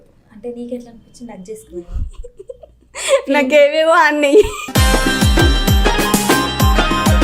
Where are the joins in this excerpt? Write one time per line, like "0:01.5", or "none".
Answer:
0:04.6